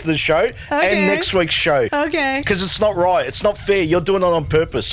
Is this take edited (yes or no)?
yes